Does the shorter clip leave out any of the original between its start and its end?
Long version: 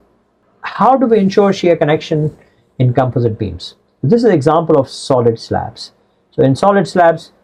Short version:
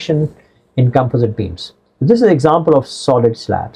no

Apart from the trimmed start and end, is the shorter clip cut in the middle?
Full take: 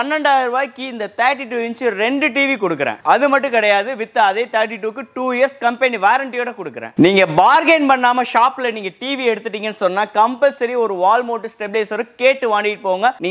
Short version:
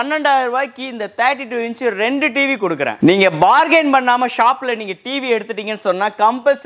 yes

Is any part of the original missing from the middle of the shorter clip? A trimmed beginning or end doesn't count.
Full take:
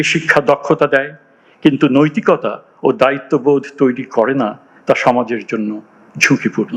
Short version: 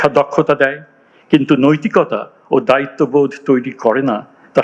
no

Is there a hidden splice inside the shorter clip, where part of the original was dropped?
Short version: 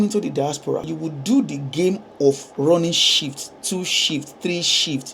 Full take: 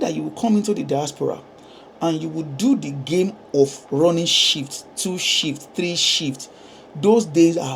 yes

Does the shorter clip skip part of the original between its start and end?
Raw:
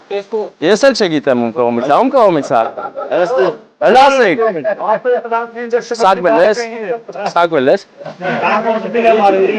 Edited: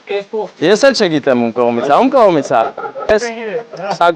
yes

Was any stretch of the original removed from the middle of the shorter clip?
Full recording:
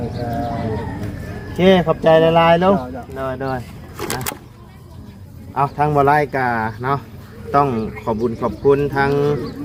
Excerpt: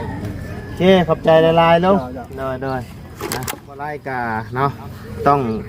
yes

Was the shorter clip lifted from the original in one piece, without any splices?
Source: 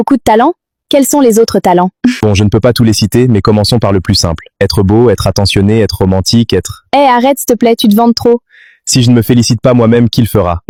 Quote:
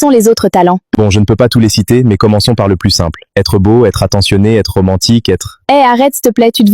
no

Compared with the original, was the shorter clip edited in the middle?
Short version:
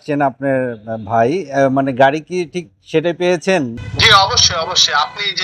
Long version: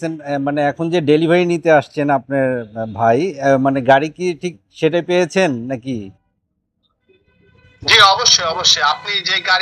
yes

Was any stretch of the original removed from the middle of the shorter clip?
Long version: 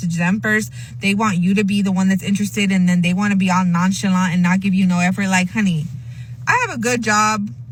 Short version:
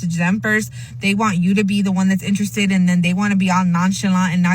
no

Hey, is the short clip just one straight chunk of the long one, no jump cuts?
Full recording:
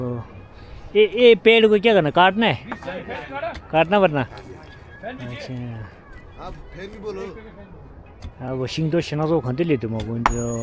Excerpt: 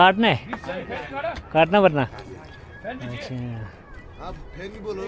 yes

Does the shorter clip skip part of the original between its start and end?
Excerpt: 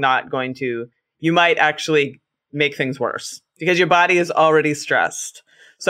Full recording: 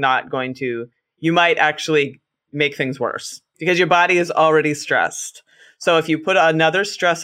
no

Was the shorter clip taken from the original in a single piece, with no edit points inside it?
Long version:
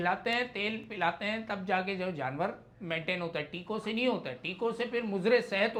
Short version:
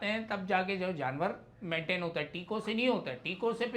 yes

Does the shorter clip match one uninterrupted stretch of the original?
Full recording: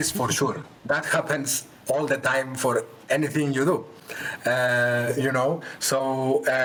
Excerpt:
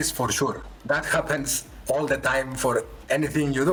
yes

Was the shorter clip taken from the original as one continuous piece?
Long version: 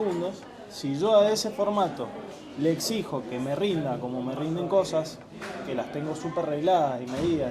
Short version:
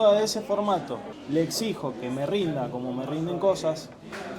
no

